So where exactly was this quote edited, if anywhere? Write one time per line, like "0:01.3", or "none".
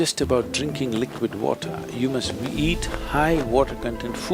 none